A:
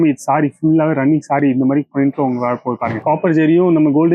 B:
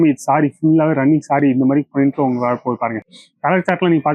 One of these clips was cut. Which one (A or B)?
A